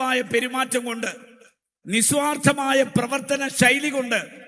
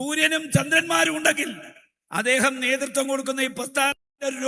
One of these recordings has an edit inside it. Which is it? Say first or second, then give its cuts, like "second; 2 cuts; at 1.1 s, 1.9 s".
second; 1 cut; at 2.6 s